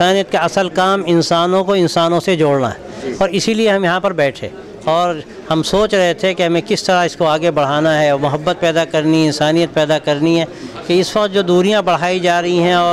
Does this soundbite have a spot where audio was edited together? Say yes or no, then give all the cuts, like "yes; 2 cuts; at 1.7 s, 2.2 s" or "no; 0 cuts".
no; 0 cuts